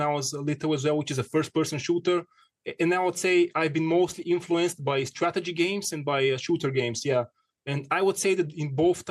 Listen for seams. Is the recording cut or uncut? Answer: uncut